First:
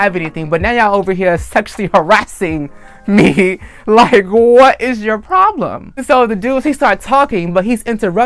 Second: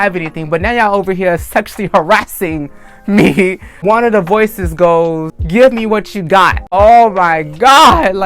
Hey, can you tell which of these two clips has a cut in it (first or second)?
second